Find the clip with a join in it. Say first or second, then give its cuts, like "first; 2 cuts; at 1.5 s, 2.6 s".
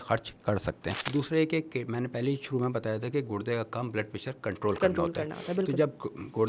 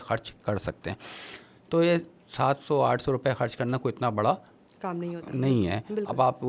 first; 1 cut; at 0.9 s